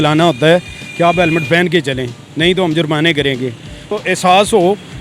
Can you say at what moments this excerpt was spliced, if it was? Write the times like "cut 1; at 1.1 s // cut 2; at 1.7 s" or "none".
cut 1; at 3.9 s